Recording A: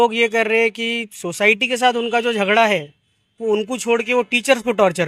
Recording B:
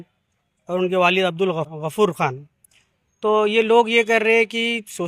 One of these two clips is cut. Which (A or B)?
B